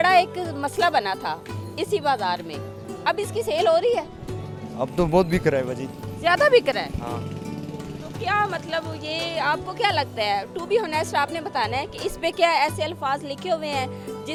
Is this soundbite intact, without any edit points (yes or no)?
yes